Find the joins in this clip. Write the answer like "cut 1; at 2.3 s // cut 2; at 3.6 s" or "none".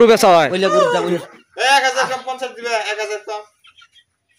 cut 1; at 1.2 s